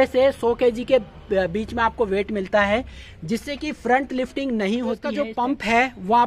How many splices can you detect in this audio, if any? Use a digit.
1